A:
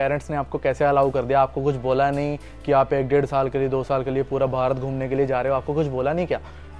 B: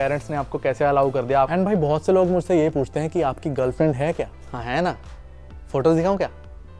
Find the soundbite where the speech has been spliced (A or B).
B